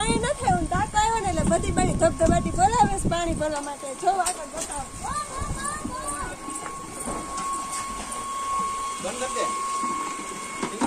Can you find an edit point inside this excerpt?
no; 0 cuts

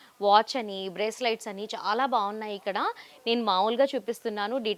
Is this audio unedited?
yes; 0 cuts

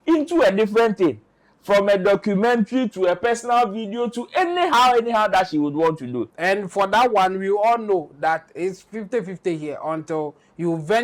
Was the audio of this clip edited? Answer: yes; 1 cut; at 6.3 s

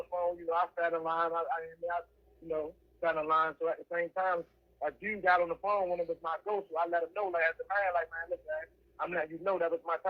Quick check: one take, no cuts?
yes; 0 cuts

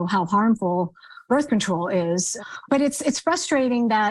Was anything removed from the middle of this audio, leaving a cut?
yes; 2 cuts; at 1.2 s, 2.6 s

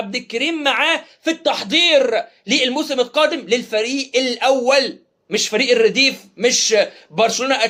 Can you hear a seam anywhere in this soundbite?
no; 0 cuts

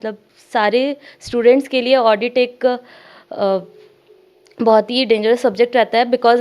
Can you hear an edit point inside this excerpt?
no; 0 cuts

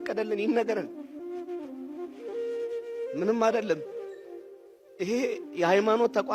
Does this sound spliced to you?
no; 0 cuts

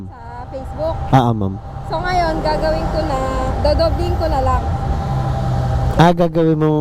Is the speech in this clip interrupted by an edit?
no; 0 cuts

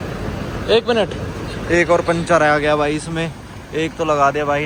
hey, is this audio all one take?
yes; 0 cuts

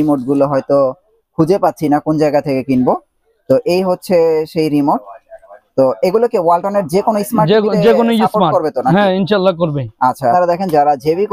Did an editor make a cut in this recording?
yes; 1 cut; at 10.3 s

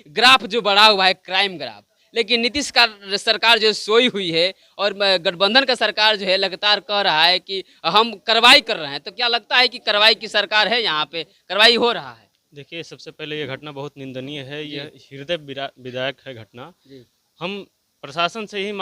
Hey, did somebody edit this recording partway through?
no; 0 cuts

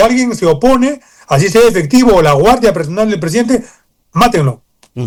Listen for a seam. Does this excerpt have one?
no; 0 cuts

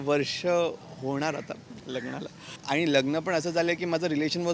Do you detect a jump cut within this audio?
yes; 1 cut; at 2.6 s

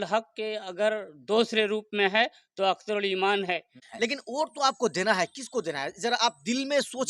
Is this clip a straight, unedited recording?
no; 1 cut; at 3.8 s

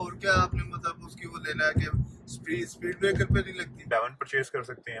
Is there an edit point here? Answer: yes; 1 cut; at 3.7 s

